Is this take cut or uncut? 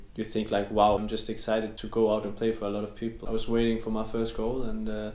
cut